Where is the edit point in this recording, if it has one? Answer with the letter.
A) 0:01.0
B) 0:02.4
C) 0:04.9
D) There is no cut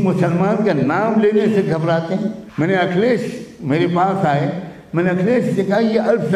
B